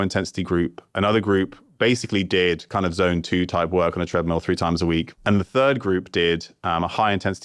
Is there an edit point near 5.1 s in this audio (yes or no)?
yes